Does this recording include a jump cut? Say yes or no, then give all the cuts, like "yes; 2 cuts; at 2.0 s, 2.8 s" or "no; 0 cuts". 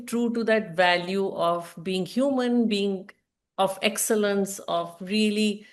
no; 0 cuts